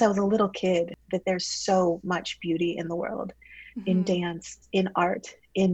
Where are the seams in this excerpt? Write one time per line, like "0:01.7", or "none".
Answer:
none